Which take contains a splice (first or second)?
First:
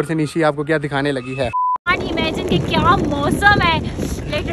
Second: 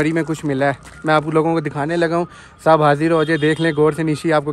first